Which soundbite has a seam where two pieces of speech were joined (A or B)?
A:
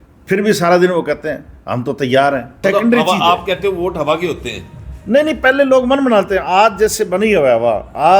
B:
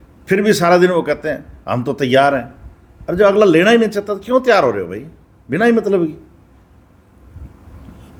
A